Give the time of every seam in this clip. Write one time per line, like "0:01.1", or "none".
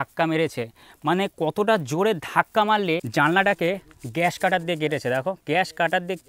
0:03.1